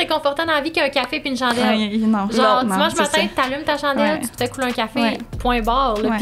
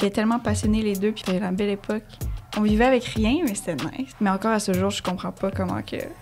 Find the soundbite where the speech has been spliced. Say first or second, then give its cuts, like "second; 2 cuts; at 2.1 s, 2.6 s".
second; 2 cuts; at 1.2 s, 4.0 s